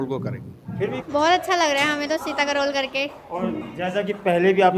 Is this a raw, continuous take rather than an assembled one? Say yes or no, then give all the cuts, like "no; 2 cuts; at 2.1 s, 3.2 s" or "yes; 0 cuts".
no; 1 cut; at 1.0 s